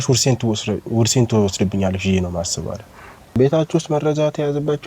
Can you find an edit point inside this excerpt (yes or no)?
yes